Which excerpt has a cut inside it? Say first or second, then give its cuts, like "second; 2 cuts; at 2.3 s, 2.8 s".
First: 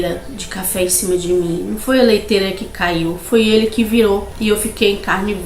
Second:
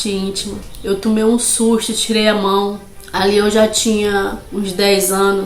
first; 1 cut; at 4.3 s